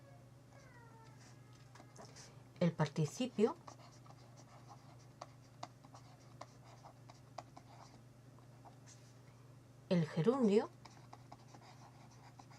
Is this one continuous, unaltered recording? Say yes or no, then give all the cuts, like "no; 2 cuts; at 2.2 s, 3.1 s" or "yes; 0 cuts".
no; 1 cut; at 6.0 s